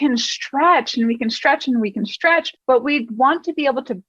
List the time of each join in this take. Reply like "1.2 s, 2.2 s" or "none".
2.5 s